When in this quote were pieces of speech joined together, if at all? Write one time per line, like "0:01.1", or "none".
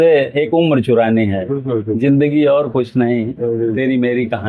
none